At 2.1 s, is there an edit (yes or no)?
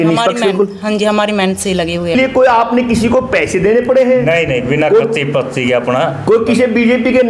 yes